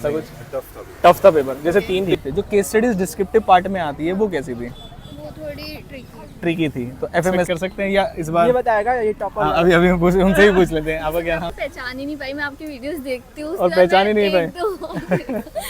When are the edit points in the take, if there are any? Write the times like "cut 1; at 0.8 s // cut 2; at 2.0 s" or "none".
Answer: cut 1; at 2.1 s // cut 2; at 7.5 s // cut 3; at 11.5 s